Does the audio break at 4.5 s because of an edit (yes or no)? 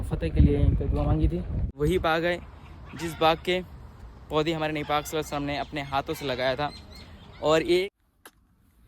no